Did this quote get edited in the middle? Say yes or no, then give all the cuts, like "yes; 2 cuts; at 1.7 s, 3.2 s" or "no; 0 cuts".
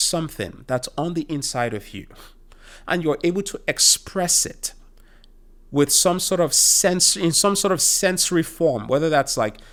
no; 0 cuts